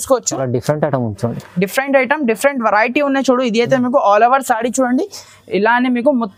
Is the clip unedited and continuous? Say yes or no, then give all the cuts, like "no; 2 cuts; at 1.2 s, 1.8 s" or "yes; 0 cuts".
yes; 0 cuts